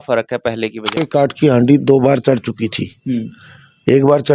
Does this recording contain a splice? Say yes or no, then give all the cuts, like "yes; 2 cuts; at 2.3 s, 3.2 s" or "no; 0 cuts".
yes; 1 cut; at 1.0 s